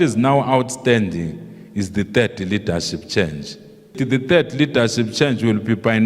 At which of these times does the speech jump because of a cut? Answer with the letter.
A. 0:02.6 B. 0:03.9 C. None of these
B